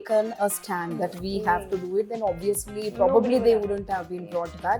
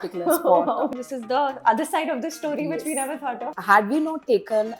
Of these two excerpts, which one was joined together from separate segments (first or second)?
second